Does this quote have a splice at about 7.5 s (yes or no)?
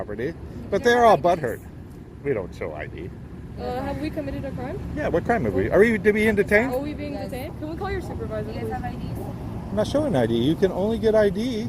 yes